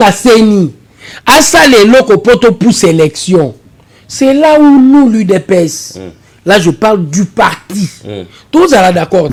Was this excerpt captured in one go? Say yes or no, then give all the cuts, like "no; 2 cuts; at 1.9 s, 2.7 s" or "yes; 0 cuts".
yes; 0 cuts